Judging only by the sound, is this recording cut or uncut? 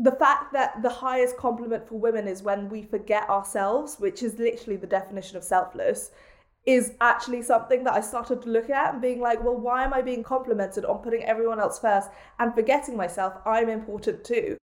uncut